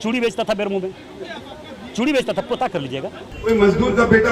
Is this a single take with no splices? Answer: no; 1 cut; at 3.2 s

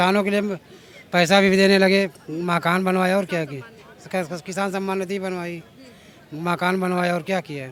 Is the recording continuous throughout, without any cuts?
yes; 0 cuts

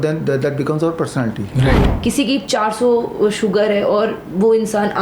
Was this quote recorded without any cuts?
no; 1 cut; at 1.9 s

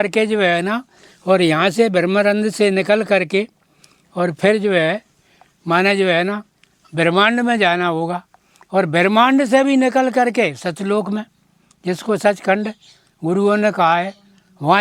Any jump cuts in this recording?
no; 0 cuts

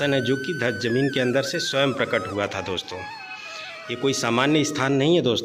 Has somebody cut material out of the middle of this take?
no; 0 cuts

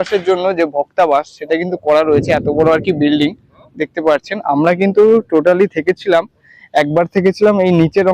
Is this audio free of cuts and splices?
yes; 0 cuts

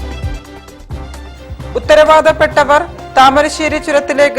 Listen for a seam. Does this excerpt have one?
yes; 1 cut; at 1.3 s

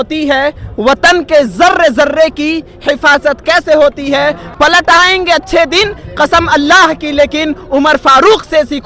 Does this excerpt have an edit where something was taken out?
yes; 1 cut; at 4.4 s

